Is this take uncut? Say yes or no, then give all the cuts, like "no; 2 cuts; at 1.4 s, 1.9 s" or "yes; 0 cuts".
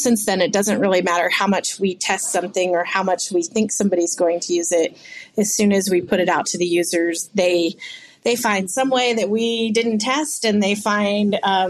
yes; 0 cuts